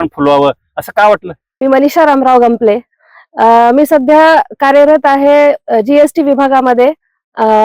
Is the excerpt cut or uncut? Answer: cut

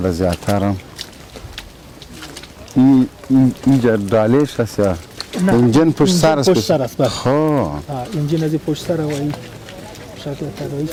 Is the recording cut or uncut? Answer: uncut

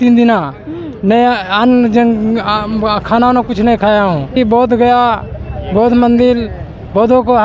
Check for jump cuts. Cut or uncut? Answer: cut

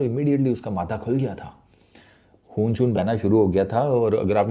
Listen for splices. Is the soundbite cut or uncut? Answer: uncut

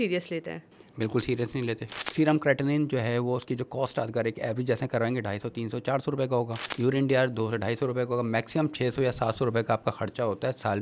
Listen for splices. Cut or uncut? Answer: cut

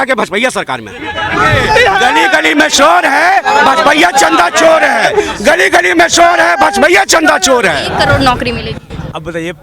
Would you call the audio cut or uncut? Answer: cut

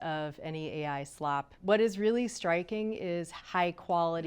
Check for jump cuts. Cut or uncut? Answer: cut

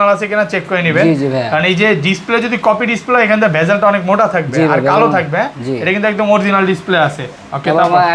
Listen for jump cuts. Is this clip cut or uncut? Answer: uncut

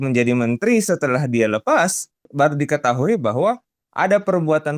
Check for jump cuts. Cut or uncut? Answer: cut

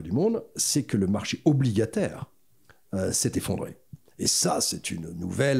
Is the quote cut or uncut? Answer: uncut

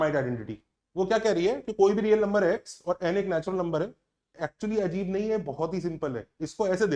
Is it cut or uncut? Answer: cut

